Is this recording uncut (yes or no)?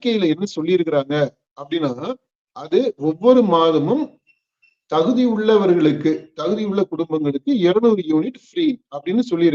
yes